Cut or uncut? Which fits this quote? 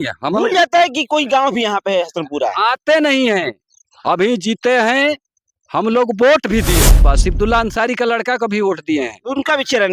cut